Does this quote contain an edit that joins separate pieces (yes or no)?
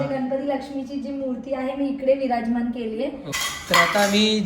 yes